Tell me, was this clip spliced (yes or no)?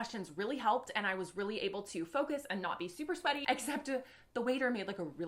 yes